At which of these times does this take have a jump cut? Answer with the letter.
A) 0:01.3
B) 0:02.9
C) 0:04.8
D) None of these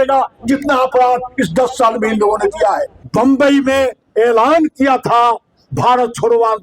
B